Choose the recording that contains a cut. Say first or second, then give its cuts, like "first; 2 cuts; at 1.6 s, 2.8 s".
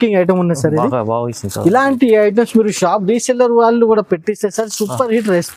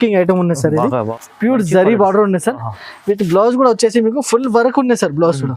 second; 1 cut; at 1.2 s